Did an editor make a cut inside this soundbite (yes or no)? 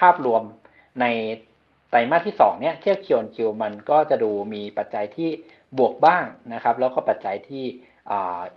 no